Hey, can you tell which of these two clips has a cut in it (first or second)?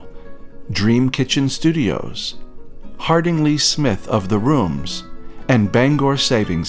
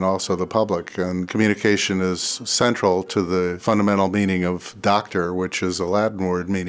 second